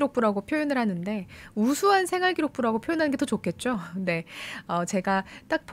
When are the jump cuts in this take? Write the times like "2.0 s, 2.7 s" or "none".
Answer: none